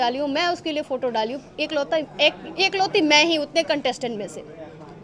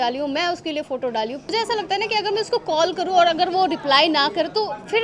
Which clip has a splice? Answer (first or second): second